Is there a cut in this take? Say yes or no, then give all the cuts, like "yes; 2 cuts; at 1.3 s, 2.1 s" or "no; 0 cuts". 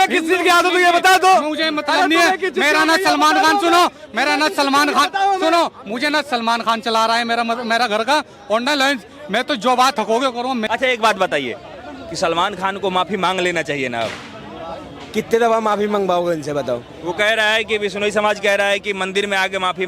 no; 0 cuts